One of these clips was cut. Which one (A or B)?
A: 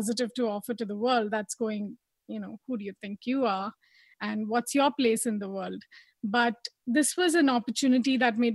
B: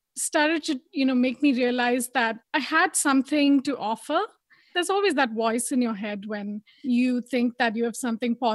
B